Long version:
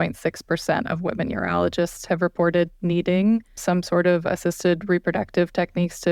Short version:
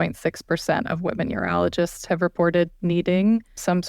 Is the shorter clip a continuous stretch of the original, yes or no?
yes